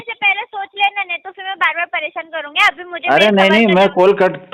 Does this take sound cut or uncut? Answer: uncut